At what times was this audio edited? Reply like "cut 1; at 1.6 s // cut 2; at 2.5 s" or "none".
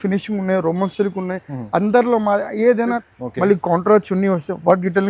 cut 1; at 3.1 s

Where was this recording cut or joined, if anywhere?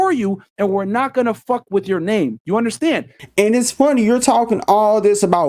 cut 1; at 3.2 s

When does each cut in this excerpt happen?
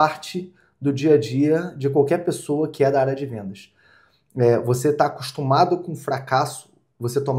none

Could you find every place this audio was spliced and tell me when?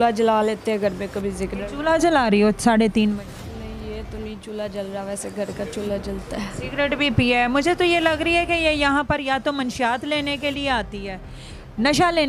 none

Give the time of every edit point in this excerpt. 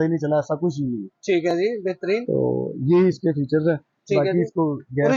none

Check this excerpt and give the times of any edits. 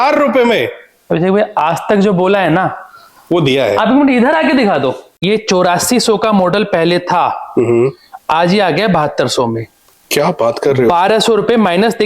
cut 1; at 5.1 s

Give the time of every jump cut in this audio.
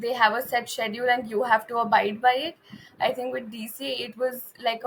none

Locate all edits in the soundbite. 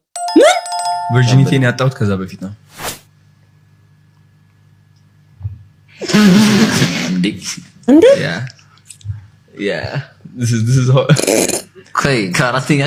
none

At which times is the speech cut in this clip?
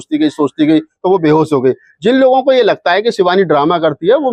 none

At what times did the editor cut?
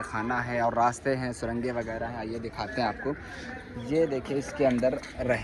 none

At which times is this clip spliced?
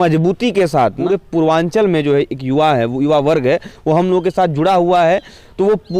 cut 1; at 1.0 s

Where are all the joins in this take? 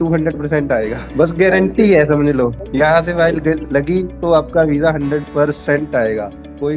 cut 1; at 1.0 s // cut 2; at 2.6 s

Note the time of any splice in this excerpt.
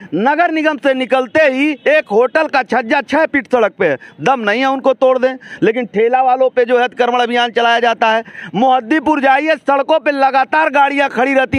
none

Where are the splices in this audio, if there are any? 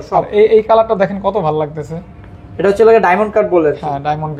none

